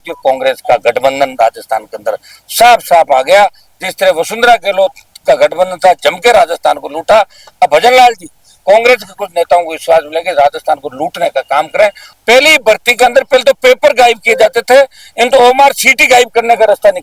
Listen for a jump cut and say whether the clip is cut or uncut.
cut